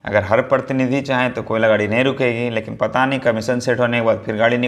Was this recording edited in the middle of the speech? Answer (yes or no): no